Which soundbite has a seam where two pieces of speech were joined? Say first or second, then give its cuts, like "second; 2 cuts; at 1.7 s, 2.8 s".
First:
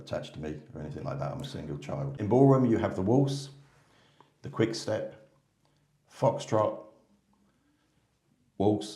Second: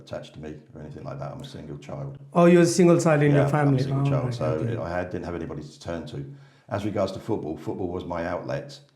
first; 1 cut; at 2.1 s